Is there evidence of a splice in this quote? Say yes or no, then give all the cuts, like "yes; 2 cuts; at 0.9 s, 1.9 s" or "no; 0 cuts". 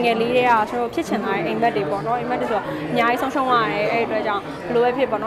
no; 0 cuts